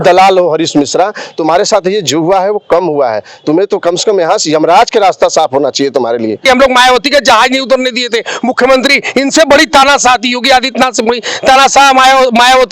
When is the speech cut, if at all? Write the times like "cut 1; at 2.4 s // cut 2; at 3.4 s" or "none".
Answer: cut 1; at 6.4 s

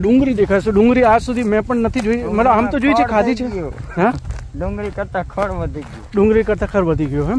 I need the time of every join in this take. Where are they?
none

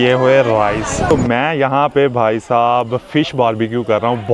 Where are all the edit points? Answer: cut 1; at 1.1 s

